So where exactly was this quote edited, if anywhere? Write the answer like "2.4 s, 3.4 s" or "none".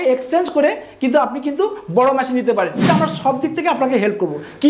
2.8 s